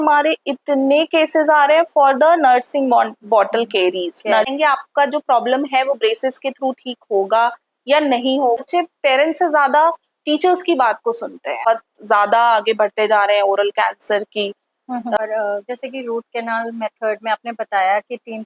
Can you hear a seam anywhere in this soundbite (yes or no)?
yes